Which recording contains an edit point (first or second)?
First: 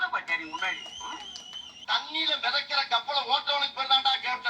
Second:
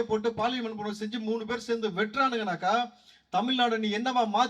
first